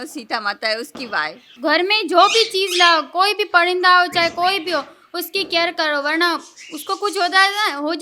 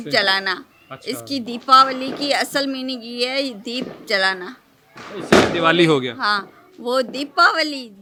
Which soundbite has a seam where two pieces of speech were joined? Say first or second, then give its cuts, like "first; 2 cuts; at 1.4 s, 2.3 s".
first; 1 cut; at 1.4 s